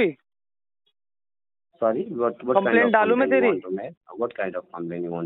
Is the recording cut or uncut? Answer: uncut